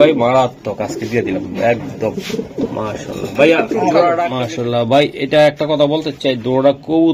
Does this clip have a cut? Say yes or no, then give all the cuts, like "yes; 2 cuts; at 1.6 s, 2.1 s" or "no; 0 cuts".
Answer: yes; 1 cut; at 4.3 s